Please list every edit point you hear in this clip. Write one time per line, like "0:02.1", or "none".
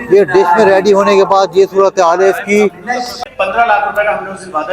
0:03.2